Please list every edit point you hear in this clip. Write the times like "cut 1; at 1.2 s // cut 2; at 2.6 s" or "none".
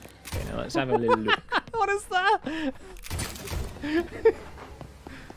none

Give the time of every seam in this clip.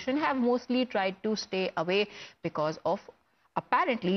none

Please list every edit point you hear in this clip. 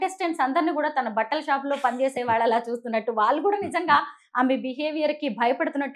none

